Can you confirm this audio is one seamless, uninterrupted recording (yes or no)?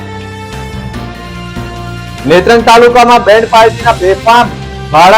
no